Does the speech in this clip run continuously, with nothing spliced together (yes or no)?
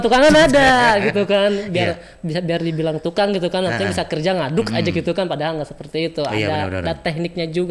yes